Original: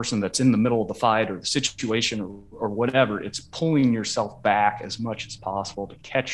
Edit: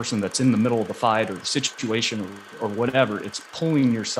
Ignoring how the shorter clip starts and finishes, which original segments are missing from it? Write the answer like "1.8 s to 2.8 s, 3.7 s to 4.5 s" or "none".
none